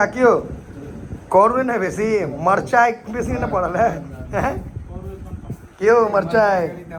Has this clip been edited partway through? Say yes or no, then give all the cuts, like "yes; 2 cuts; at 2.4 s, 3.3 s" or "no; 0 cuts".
no; 0 cuts